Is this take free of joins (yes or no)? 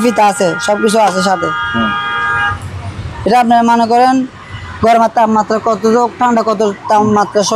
yes